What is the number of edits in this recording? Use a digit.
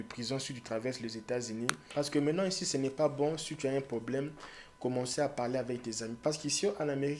1